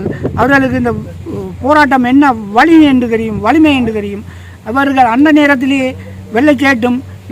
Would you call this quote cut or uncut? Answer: uncut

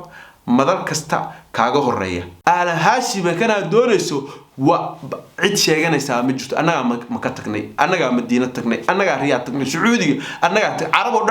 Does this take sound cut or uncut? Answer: cut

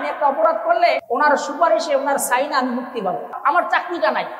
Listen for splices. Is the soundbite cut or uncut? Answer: cut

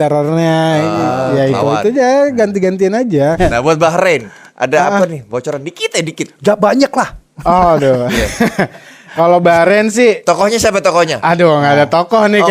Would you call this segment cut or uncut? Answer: cut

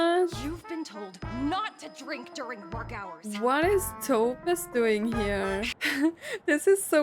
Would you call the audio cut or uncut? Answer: cut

